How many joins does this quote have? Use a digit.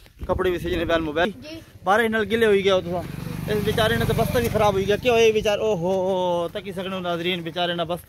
1